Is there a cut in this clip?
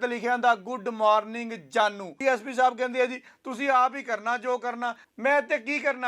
yes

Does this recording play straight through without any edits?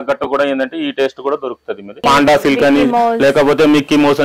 no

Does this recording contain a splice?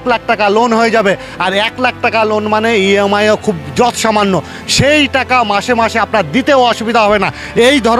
no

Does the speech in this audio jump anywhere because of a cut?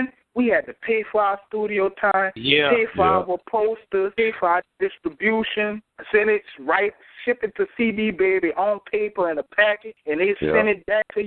yes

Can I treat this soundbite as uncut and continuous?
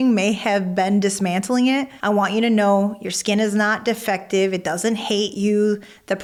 yes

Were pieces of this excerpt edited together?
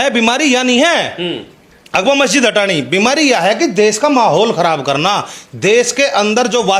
no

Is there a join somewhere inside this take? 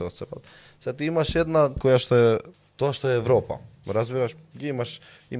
yes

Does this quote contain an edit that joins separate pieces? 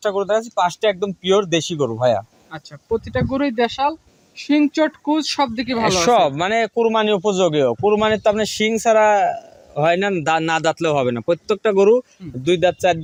no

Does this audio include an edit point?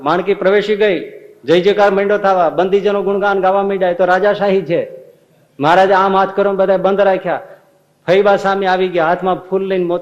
no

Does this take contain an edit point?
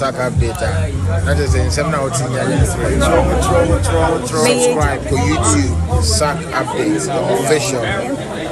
no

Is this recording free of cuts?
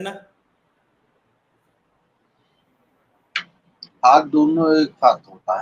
yes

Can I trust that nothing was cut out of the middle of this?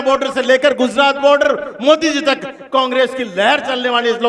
yes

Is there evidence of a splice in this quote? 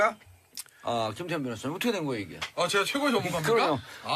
no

